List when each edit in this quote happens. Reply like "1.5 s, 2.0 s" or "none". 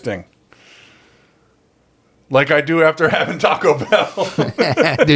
none